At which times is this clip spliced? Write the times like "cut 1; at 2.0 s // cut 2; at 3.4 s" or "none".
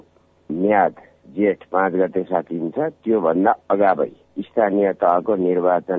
none

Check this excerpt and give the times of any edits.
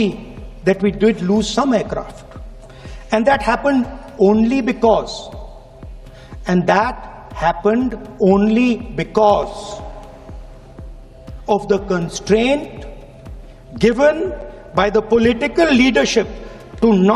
none

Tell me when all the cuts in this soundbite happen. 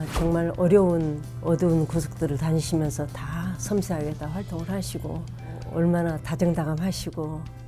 cut 1; at 1.3 s // cut 2; at 5.6 s

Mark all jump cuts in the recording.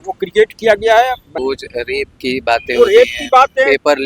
cut 1; at 1.3 s

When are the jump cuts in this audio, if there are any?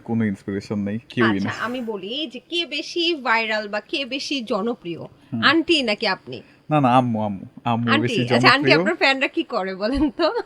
none

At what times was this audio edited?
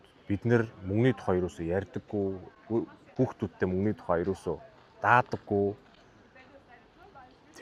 none

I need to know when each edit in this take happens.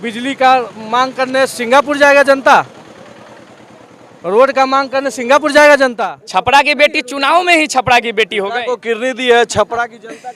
cut 1; at 6.0 s

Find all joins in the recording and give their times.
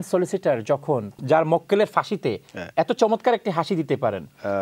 cut 1; at 1.1 s

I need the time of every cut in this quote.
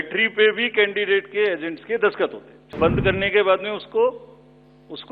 cut 1; at 2.8 s

